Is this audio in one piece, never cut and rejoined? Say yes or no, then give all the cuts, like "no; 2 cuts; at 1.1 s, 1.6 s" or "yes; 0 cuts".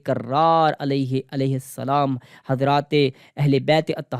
yes; 0 cuts